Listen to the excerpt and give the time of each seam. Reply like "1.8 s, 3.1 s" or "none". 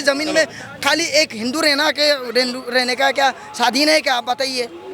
none